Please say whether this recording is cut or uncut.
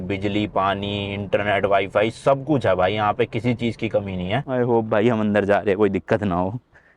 cut